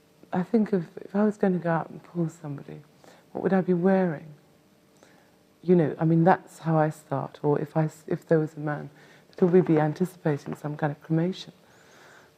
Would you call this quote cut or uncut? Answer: uncut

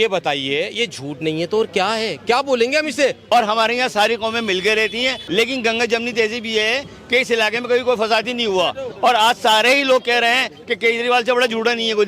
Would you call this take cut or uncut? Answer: cut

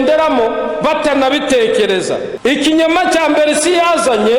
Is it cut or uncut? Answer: cut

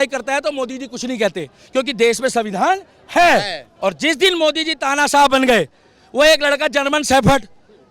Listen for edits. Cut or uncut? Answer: cut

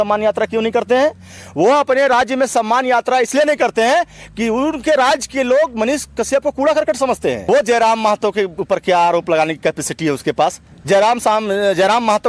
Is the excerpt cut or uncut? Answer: cut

